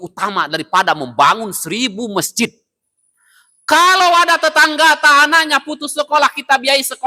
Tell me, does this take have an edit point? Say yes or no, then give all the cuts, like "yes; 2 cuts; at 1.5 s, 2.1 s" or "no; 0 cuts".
no; 0 cuts